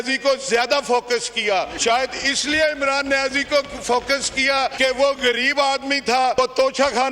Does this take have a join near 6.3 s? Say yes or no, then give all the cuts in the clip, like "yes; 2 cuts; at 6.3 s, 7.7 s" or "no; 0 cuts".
yes; 3 cuts; at 1.7 s, 4.7 s, 6.3 s